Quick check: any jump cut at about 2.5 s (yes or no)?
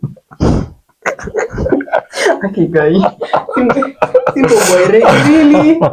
no